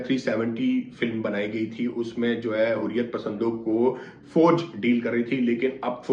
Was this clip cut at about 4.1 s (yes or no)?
no